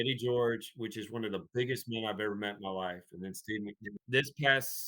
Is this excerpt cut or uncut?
cut